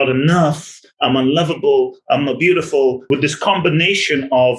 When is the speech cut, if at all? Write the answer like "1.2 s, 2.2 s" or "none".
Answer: 3.0 s